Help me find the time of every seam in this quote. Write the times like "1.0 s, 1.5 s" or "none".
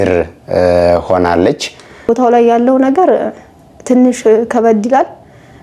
2.1 s